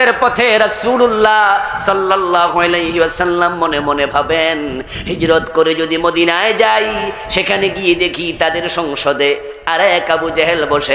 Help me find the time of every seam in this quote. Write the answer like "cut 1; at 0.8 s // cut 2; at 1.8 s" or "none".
none